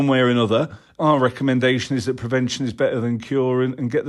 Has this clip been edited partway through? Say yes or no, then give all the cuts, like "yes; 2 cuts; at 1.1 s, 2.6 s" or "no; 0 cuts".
yes; 1 cut; at 0.9 s